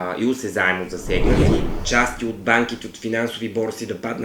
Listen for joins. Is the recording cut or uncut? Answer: cut